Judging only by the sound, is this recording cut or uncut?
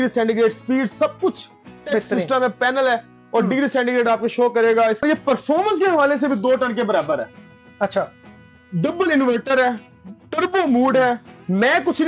cut